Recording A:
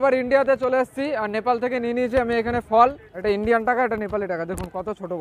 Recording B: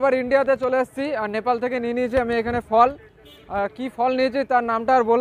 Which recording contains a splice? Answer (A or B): A